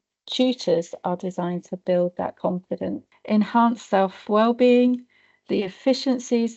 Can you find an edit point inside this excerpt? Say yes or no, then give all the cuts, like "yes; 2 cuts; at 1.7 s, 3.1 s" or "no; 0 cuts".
yes; 1 cut; at 3.1 s